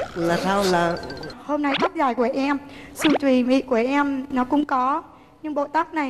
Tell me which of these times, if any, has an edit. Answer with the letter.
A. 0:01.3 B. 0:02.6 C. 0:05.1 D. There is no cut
A